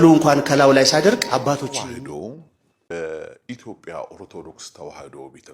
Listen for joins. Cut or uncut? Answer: cut